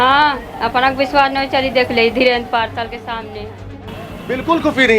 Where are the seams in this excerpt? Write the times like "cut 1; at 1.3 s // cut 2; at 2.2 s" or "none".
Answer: cut 1; at 3.8 s